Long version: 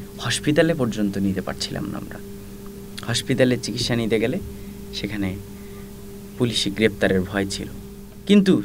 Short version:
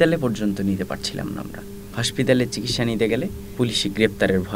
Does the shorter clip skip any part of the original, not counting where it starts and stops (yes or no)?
yes